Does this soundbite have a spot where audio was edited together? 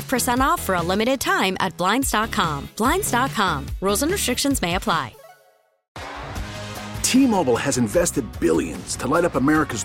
yes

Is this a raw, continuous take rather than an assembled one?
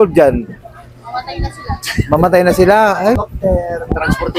no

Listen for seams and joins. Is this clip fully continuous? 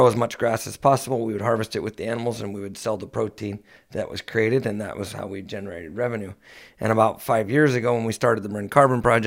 yes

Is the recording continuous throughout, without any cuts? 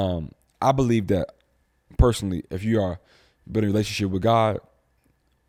yes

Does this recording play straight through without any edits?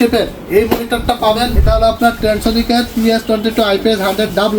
no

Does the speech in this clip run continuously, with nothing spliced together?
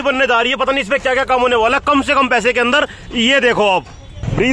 yes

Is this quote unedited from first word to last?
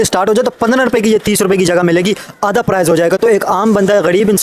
yes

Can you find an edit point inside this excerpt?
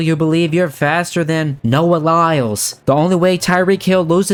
no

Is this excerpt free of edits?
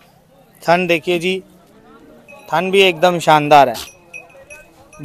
yes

